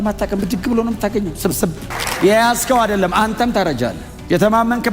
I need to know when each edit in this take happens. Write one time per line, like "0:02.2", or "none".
0:02.1